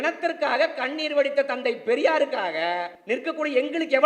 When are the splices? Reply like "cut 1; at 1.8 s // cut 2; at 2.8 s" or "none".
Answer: cut 1; at 2.9 s